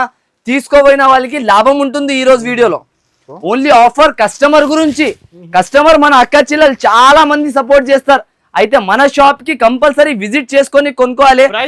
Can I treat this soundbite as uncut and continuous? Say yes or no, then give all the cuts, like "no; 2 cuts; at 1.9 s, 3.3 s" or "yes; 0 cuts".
yes; 0 cuts